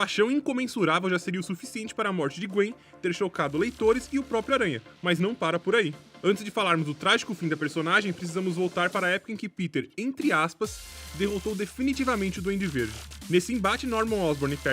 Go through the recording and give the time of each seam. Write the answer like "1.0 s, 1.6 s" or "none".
2.6 s